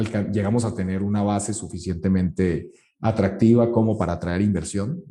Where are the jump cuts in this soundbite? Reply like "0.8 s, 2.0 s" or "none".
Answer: none